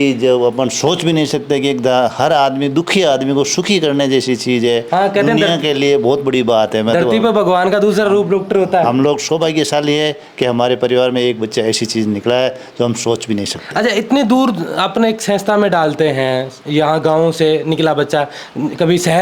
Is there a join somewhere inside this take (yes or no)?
no